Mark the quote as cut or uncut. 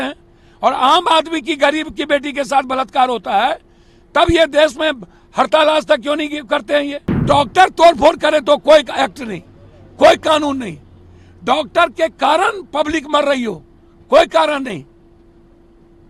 cut